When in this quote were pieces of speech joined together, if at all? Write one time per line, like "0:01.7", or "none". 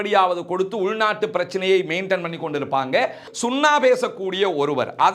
0:03.2